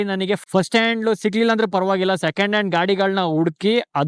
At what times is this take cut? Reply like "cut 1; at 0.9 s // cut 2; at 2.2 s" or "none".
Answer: none